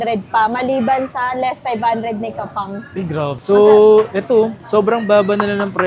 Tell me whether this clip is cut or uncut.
cut